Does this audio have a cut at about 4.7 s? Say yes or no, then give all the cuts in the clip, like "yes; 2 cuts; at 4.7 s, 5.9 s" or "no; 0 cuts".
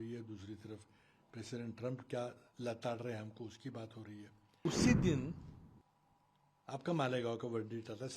yes; 1 cut; at 4.7 s